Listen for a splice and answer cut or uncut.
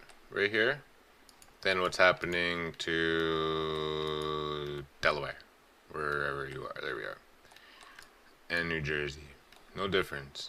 uncut